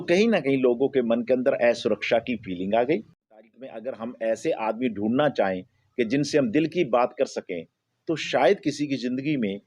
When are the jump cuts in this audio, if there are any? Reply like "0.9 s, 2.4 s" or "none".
3.4 s